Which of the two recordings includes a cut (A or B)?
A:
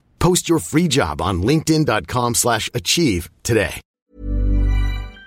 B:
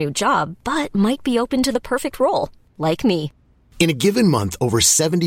A